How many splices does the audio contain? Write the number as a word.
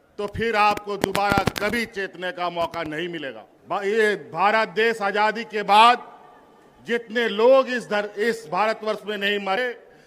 one